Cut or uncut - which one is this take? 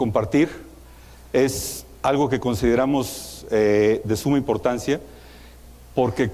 uncut